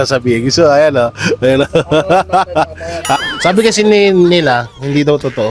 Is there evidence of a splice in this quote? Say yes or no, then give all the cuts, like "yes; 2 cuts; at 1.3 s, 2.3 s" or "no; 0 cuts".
yes; 1 cut; at 3.2 s